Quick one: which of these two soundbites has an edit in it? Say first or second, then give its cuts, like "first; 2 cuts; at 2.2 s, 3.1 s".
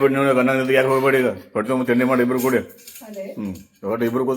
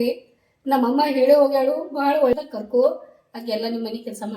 second; 1 cut; at 2.3 s